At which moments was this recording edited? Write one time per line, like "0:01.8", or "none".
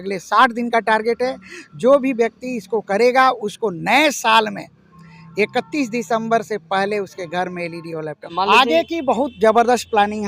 0:08.3